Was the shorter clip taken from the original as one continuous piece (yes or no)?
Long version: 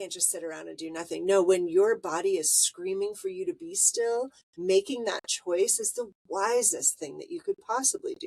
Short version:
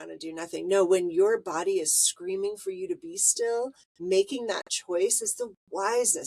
yes